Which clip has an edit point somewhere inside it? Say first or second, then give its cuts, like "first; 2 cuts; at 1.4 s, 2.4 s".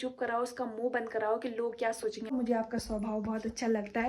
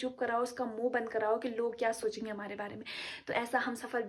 first; 1 cut; at 2.3 s